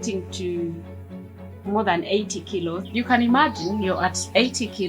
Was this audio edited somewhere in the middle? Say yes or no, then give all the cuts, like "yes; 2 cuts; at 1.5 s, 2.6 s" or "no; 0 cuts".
yes; 1 cut; at 2.8 s